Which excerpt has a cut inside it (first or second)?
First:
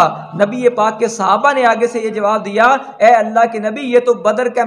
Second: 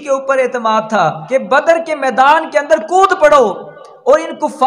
second